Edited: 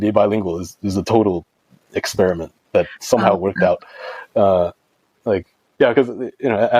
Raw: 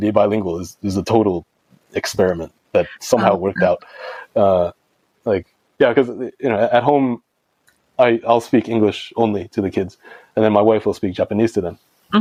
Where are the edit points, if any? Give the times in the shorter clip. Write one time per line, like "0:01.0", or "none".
none